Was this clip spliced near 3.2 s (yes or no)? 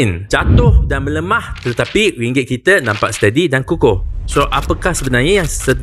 no